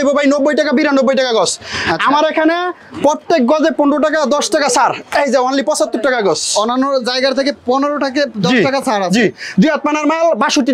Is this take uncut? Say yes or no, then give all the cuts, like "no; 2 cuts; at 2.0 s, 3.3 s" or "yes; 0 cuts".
yes; 0 cuts